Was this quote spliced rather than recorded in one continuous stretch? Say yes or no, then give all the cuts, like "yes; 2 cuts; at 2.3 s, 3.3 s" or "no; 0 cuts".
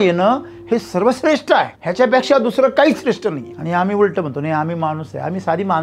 yes; 2 cuts; at 1.8 s, 3.5 s